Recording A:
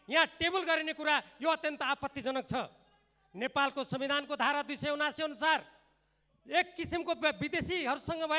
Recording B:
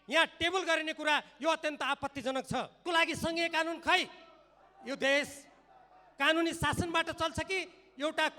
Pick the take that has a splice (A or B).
B